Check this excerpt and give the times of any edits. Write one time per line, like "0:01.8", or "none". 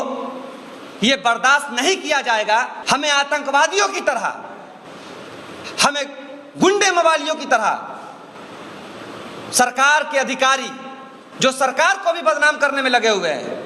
0:02.8